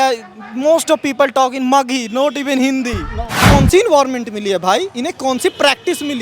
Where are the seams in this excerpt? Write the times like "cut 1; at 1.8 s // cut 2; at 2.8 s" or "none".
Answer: cut 1; at 3.4 s